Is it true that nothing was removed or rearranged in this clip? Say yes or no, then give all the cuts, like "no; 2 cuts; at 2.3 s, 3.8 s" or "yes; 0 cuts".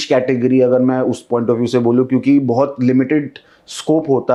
yes; 0 cuts